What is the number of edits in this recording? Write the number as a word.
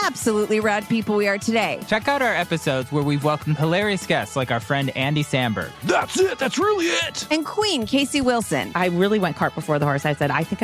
one